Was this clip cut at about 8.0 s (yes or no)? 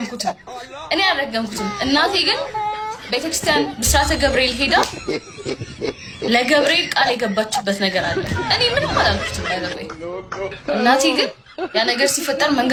no